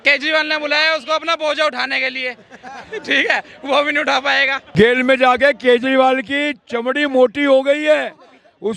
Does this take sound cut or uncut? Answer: cut